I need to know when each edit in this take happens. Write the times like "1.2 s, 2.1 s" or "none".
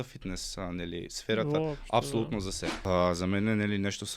2.8 s